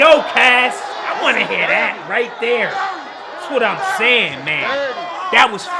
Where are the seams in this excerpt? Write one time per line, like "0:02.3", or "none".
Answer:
none